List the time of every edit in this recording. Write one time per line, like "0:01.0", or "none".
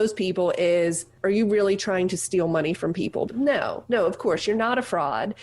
0:01.1
0:03.3